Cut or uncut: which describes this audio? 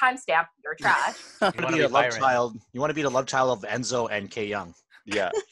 cut